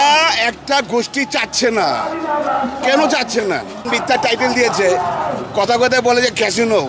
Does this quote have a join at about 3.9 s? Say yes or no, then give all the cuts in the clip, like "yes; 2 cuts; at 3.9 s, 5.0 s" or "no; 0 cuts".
yes; 1 cut; at 3.9 s